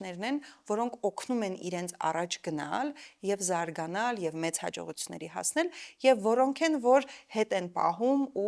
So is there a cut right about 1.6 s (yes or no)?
no